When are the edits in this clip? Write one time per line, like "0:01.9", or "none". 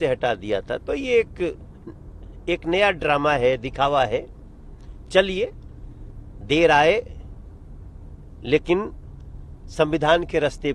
none